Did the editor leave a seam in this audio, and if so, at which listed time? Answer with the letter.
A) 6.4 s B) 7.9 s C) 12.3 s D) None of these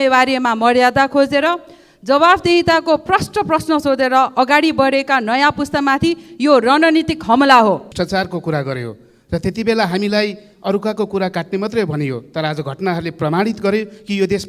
B